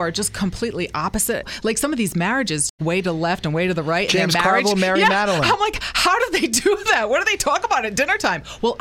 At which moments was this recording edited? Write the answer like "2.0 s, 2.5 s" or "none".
1.5 s, 2.8 s